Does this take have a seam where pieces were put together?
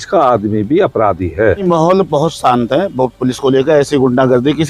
yes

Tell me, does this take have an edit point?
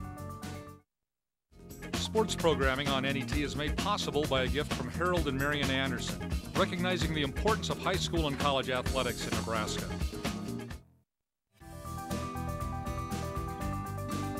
yes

